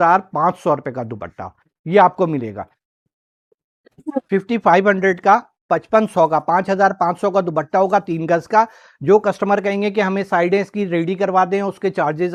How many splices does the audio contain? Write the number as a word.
zero